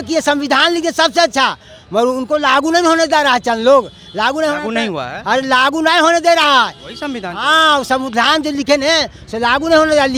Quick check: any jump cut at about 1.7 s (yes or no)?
no